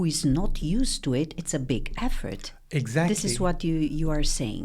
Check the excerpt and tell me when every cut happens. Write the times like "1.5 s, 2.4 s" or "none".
none